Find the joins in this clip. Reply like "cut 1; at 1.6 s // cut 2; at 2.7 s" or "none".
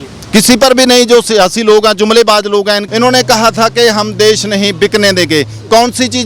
cut 1; at 2.8 s